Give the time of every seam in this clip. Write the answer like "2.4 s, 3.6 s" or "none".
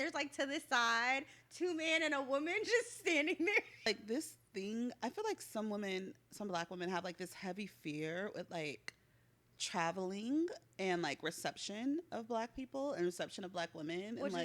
3.9 s

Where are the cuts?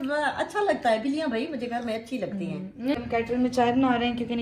3.0 s

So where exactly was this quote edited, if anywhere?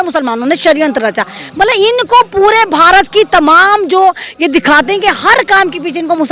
none

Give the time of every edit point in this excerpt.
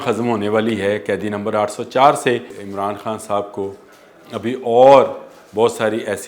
2.6 s

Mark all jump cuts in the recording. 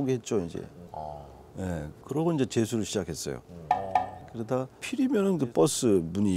4.8 s

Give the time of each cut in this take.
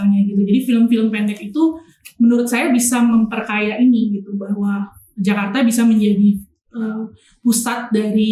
none

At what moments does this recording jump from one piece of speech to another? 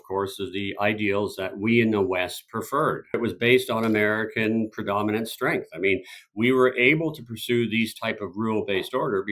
3.1 s

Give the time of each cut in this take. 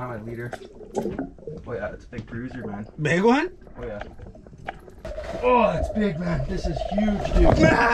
5.0 s

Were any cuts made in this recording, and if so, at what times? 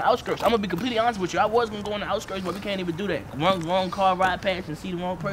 none

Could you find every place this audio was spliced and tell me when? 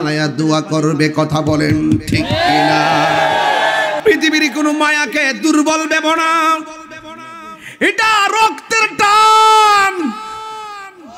4.0 s

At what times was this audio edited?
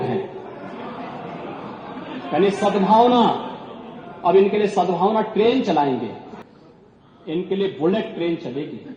6.3 s

